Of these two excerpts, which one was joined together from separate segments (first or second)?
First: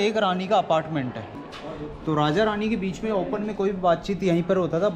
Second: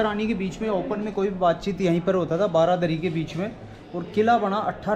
first